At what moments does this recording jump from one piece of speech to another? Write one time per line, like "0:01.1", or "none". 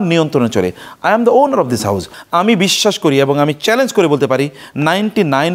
0:02.1